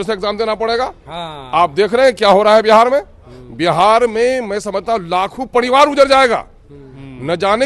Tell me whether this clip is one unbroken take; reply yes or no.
yes